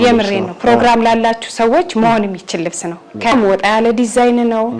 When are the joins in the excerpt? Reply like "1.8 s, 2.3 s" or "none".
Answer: 3.3 s